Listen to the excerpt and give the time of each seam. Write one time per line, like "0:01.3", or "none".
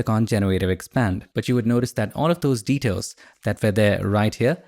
0:01.3